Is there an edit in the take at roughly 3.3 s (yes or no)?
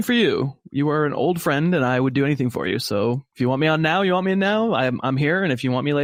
no